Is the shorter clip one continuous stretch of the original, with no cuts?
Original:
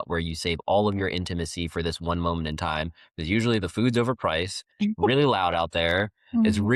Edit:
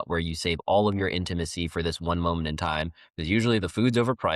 yes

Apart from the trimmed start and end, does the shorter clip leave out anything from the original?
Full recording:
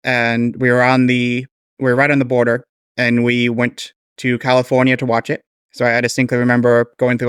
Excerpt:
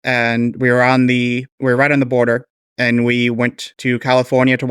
yes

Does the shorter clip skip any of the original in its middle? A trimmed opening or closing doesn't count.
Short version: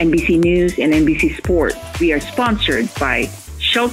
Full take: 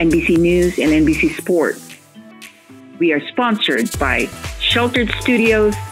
yes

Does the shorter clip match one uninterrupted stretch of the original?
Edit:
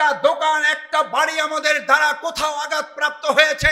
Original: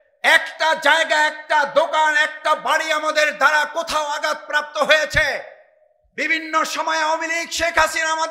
yes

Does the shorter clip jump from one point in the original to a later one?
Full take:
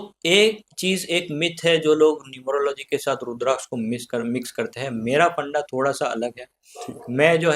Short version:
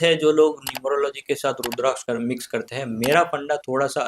yes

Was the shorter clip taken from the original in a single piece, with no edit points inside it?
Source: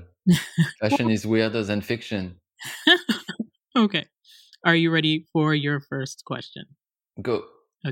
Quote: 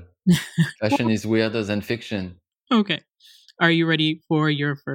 no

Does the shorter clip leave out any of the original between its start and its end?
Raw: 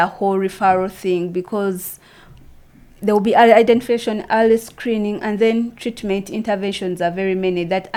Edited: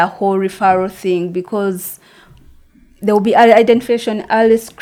no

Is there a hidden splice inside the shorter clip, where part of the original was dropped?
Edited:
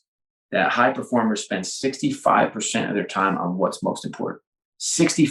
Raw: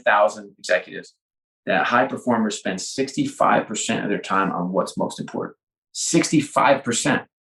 no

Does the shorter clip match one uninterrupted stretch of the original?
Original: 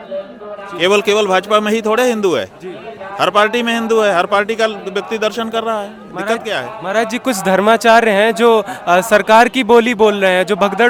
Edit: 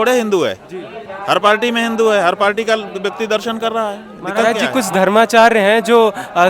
no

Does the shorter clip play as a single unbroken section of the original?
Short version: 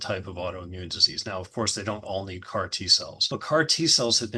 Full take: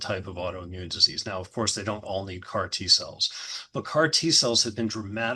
no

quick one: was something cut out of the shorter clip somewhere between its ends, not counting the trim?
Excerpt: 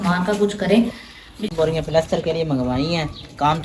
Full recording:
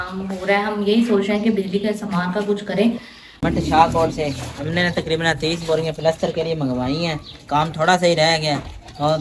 yes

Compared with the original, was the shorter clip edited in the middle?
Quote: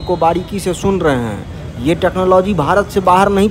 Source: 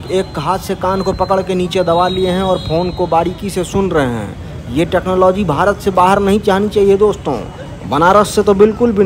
no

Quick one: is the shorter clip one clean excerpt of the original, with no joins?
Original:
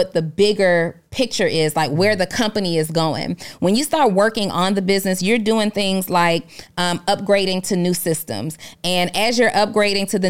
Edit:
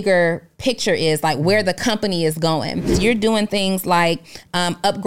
no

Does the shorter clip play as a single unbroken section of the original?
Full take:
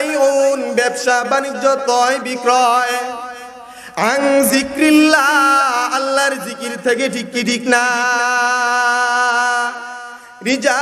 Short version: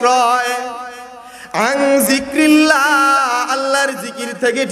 yes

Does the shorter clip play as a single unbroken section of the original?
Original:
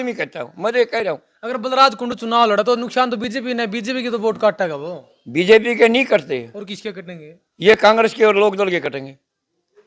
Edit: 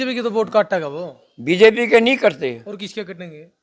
yes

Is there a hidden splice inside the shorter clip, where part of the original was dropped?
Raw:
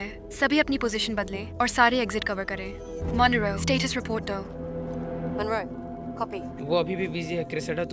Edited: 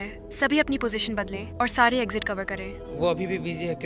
yes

